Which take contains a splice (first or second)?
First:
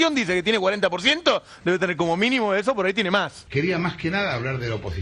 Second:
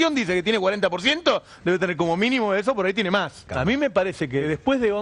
first